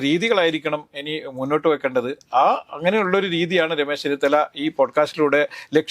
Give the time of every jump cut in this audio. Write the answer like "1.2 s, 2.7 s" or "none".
none